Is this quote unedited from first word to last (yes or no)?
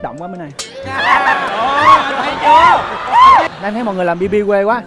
no